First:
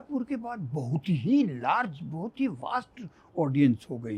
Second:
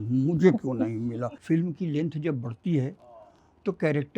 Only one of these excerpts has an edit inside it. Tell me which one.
second; 1 cut; at 1.3 s

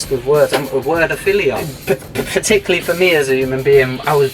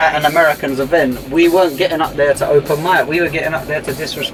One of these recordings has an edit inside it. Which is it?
first; 1 cut; at 1.7 s

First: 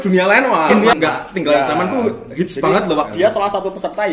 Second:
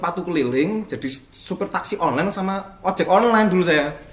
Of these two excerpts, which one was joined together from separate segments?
first; 2 cuts; at 0.9 s, 3.1 s

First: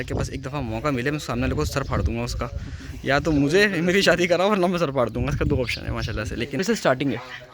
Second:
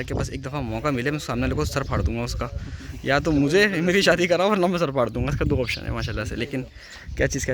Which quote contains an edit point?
first; 1 cut; at 6.6 s

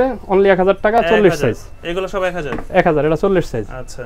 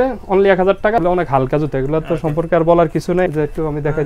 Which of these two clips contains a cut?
second; 2 cuts; at 1.0 s, 3.3 s

